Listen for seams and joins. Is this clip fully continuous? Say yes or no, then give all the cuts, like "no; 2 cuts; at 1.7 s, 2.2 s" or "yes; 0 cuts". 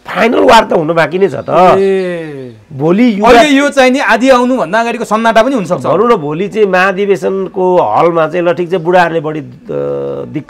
yes; 0 cuts